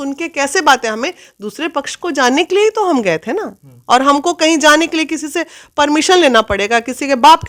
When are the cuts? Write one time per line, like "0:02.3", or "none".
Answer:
none